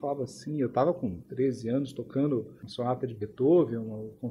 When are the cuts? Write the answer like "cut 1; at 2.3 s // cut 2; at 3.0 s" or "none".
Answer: cut 1; at 1.2 s // cut 2; at 2.6 s